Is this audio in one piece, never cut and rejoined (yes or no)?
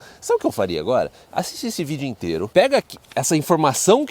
no